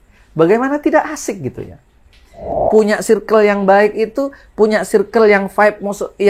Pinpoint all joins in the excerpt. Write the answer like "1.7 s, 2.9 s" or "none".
2.6 s